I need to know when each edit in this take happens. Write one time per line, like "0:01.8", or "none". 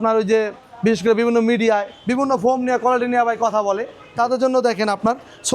0:02.0